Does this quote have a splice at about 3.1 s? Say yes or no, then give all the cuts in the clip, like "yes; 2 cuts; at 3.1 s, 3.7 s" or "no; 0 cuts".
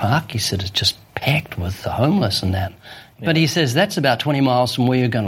yes; 1 cut; at 3.1 s